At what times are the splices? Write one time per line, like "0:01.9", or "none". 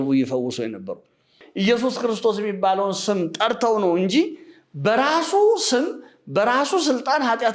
0:01.4